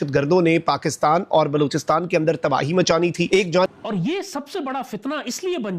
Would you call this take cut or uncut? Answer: cut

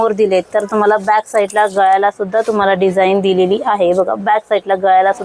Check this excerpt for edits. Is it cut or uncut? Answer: uncut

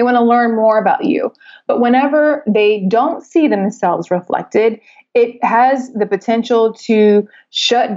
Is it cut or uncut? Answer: uncut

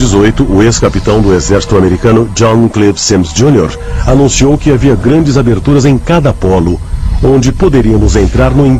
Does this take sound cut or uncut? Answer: uncut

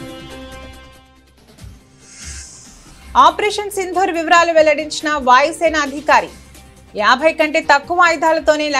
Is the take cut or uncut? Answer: cut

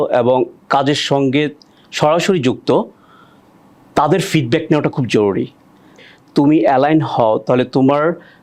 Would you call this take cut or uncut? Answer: cut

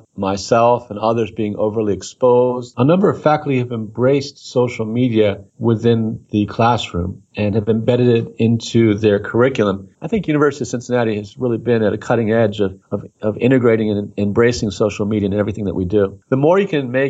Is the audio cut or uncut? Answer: cut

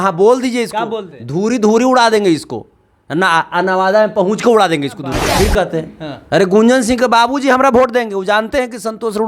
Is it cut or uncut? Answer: cut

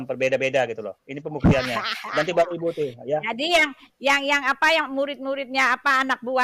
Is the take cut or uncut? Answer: uncut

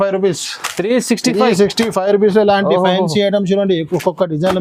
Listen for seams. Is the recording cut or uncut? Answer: uncut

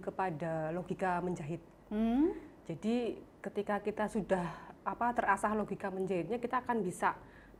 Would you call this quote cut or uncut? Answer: uncut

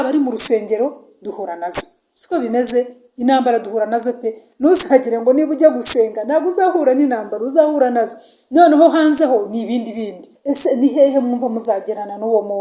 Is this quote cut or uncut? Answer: cut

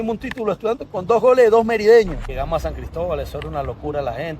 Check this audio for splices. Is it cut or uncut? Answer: cut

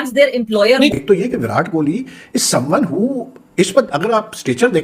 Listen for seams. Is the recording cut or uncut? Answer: cut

